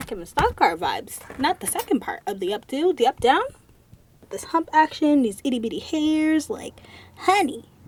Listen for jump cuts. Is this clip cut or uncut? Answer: uncut